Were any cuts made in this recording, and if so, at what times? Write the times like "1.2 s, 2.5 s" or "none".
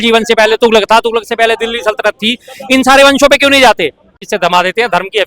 4.2 s